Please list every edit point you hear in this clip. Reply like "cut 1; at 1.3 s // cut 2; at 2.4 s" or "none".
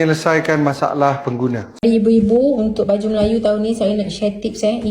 cut 1; at 1.8 s